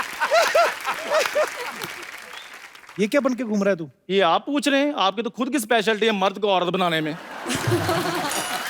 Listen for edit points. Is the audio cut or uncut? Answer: cut